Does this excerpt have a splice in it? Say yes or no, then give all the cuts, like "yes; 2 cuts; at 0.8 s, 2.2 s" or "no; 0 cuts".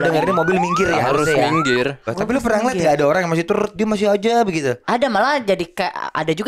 yes; 1 cut; at 2.1 s